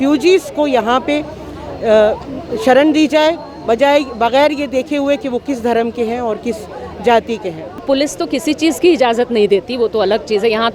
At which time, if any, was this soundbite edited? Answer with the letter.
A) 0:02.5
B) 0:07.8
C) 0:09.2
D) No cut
B